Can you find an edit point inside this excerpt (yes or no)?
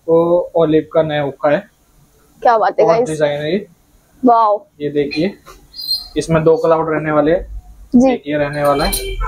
no